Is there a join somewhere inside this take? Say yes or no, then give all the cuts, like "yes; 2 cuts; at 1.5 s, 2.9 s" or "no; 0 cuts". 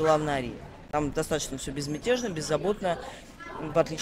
no; 0 cuts